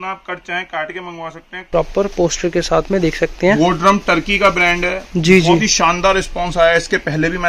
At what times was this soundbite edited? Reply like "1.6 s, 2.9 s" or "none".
1.7 s